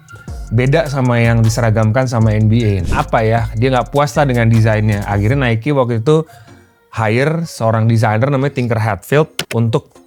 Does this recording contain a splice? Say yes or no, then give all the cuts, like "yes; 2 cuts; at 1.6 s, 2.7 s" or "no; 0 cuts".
yes; 1 cut; at 2.8 s